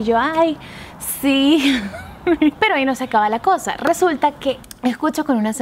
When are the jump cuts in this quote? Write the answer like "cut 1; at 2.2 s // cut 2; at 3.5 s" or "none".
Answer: cut 1; at 2.5 s // cut 2; at 4.6 s